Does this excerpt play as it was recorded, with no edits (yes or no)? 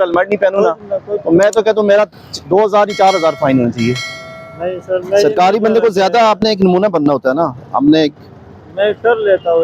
yes